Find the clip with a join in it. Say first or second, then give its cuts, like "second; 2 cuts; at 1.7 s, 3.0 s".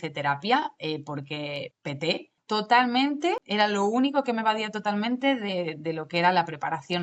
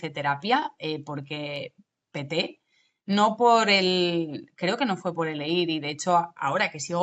first; 2 cuts; at 2.3 s, 3.4 s